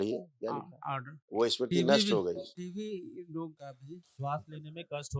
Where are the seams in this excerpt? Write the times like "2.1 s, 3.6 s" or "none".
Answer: 2.6 s, 3.7 s